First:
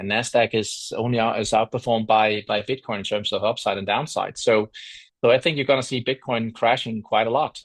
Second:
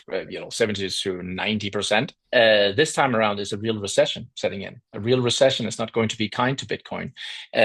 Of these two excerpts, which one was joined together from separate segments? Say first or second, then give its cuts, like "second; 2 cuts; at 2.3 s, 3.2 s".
second; 1 cut; at 2.2 s